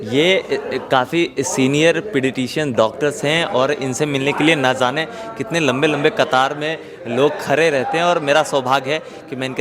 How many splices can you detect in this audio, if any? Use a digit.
0